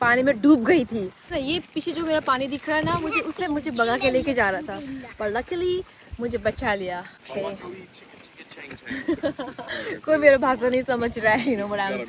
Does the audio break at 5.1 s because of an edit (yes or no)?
no